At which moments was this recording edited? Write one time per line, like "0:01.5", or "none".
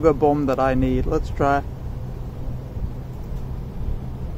none